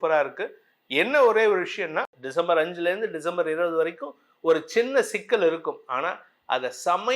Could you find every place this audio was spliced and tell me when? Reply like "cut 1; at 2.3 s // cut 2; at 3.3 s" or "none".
cut 1; at 2.2 s